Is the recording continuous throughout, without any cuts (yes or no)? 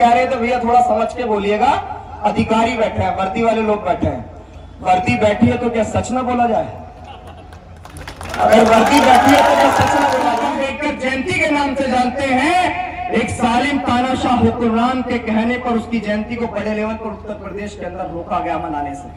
yes